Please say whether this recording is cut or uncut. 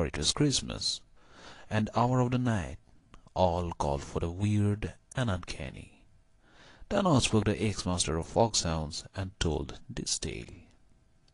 cut